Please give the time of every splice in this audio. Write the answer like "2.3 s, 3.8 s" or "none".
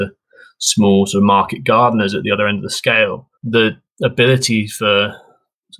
3.3 s, 3.9 s